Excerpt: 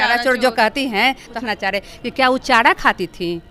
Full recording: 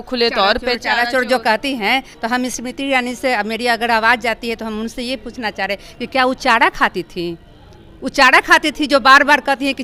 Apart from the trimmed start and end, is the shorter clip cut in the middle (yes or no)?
yes